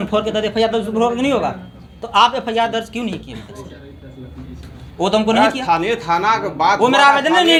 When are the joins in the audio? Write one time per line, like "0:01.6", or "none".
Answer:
none